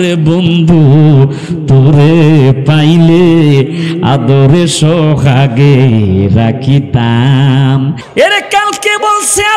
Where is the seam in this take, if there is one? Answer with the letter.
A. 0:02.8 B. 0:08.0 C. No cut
B